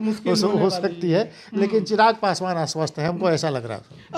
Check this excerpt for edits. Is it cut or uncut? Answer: uncut